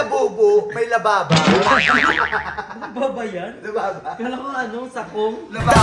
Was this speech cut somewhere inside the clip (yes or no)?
no